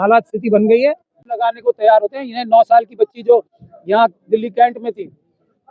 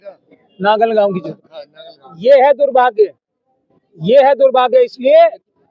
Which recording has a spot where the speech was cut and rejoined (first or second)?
first